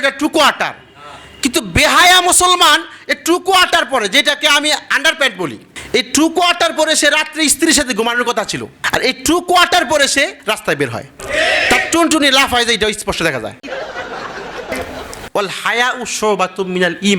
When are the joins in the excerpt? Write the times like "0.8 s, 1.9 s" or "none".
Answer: 5.7 s, 15.2 s